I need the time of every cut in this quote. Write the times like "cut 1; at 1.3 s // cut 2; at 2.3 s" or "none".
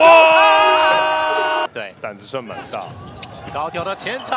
cut 1; at 1.7 s